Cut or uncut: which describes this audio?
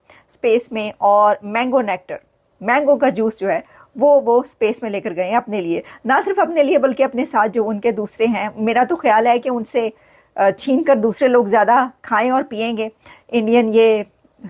uncut